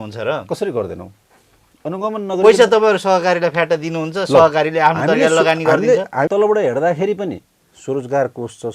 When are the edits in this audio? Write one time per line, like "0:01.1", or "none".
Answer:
0:06.3